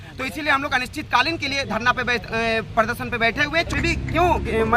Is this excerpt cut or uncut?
cut